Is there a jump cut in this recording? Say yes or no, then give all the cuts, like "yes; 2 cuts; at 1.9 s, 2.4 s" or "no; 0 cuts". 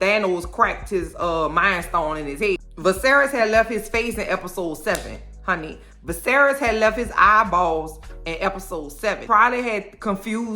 yes; 2 cuts; at 2.6 s, 9.2 s